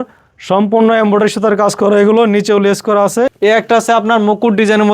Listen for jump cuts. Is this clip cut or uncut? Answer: cut